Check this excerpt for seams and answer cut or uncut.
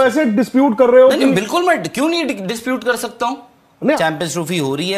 cut